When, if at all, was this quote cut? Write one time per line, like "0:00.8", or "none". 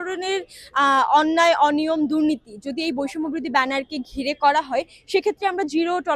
none

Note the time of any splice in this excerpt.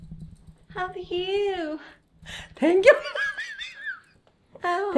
none

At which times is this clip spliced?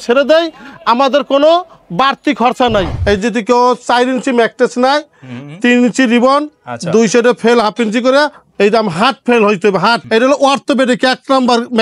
0:02.9
0:10.0

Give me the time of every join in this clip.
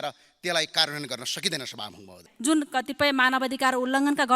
0:02.3

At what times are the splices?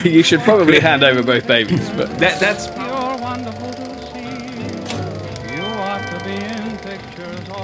0:02.6

